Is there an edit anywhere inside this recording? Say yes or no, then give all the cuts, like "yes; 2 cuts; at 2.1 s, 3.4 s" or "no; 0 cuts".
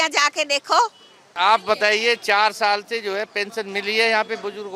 yes; 1 cut; at 1.2 s